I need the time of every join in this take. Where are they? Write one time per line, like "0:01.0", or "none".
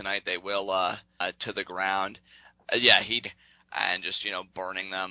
0:01.2
0:03.2